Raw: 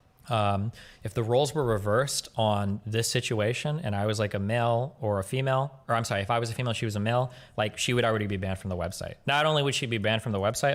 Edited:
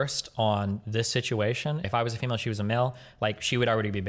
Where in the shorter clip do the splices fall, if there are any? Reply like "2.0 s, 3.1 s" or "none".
1.9 s